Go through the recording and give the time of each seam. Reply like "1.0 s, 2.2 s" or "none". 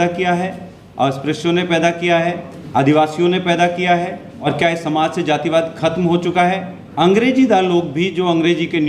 2.5 s, 4.4 s, 6.8 s